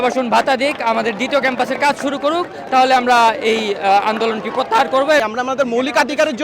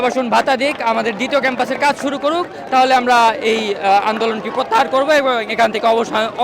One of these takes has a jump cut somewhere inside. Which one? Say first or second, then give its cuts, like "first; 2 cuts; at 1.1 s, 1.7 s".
first; 1 cut; at 5.2 s